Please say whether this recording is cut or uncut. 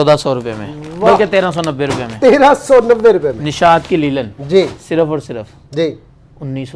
uncut